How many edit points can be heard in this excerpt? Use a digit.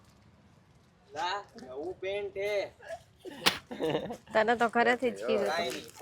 0